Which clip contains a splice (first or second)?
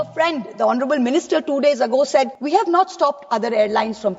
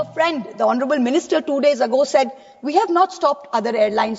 first